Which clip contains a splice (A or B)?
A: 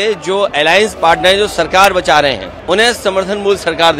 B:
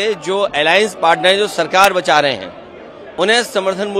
A